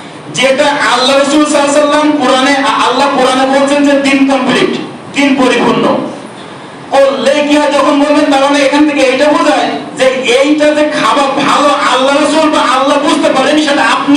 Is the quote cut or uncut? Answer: uncut